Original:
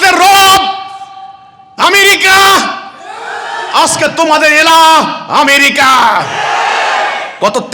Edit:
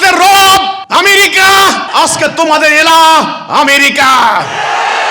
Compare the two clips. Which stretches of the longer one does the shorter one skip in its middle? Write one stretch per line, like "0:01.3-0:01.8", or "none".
0:00.8-0:01.7
0:02.7-0:03.7

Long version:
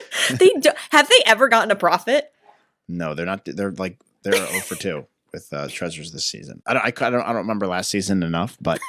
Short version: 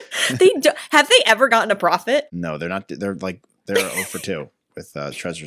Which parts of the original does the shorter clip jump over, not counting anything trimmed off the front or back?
0:02.3-0:02.9

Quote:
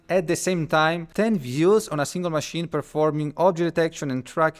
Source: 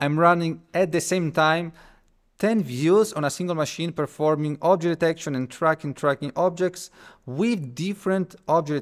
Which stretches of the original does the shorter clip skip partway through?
0:01.7-0:02.3

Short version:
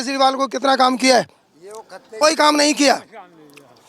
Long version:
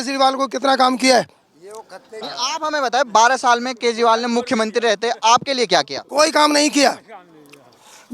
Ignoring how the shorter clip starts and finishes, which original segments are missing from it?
0:02.0-0:06.0

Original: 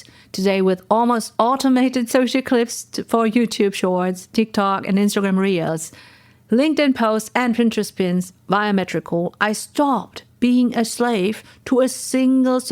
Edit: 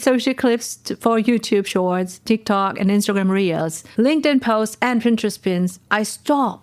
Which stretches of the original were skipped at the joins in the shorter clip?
0:05.9-0:06.3
0:08.4-0:09.3

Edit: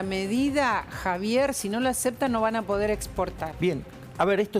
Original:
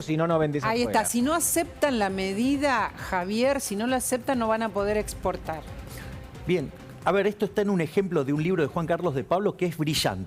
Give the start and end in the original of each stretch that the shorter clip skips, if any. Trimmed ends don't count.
0:05.5-0:06.3

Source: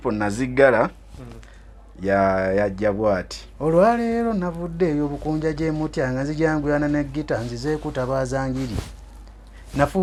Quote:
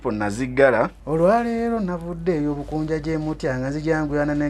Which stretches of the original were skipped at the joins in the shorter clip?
0:01.0-0:03.5

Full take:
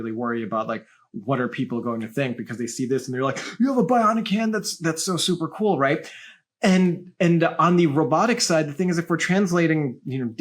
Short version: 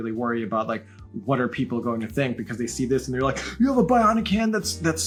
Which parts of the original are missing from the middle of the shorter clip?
none

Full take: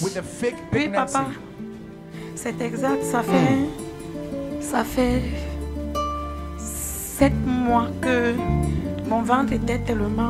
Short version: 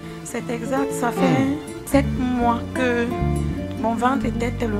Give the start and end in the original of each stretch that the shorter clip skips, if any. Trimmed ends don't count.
0:03.8-0:07.0

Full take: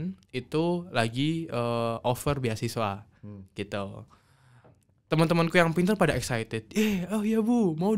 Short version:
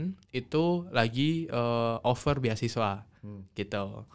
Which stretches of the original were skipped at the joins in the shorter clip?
none

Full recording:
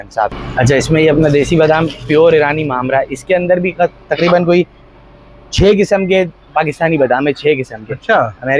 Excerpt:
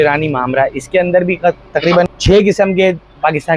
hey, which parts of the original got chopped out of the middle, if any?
0:04.4-0:05.4

